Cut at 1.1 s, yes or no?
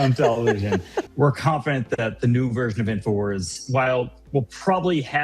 yes